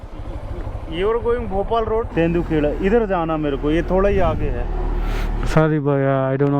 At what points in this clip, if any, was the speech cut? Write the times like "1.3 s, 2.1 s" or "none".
2.1 s